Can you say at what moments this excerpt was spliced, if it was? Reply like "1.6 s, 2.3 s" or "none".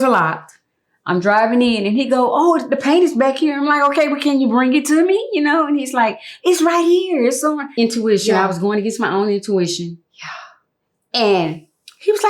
7.7 s